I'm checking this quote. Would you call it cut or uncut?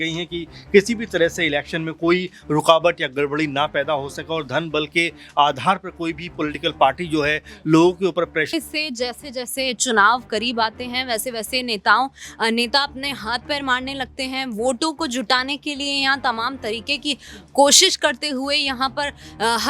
cut